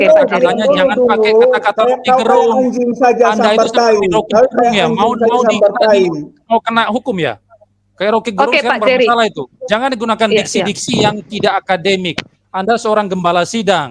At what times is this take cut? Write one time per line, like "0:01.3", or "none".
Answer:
none